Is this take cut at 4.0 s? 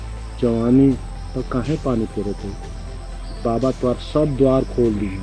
no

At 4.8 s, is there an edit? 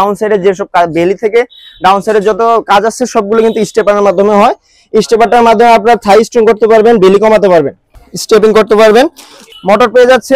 no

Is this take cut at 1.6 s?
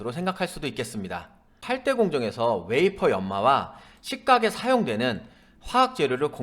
yes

